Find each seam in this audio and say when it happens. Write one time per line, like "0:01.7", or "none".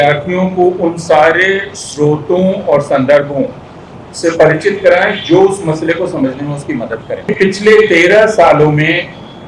0:07.3